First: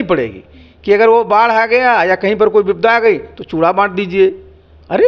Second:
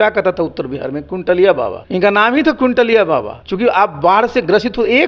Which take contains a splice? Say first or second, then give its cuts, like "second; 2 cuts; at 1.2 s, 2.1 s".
second; 2 cuts; at 1.8 s, 3.4 s